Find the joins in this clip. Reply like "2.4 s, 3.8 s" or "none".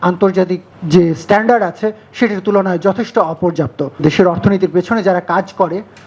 4.0 s